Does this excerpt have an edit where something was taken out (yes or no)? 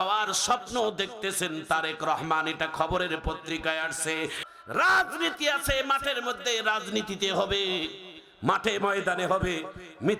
yes